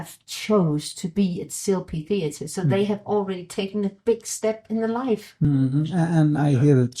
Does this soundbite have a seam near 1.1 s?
no; 1 cut; at 5.5 s

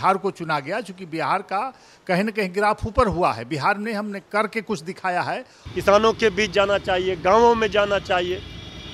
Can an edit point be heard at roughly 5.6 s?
yes; 1 cut; at 5.6 s

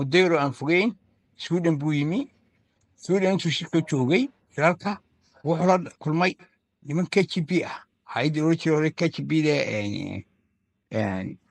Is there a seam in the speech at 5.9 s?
yes; 1 cut; at 5.9 s

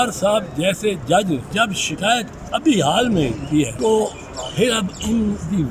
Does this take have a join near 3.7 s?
yes; 2 cuts; at 1.5 s, 3.7 s

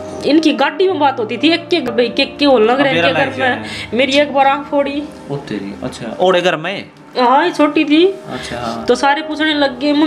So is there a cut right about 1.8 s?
yes; 1 cut; at 1.8 s

